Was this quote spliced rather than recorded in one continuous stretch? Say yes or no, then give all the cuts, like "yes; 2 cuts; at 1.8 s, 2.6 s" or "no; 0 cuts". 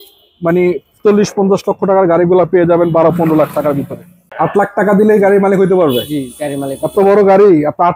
yes; 1 cut; at 4.2 s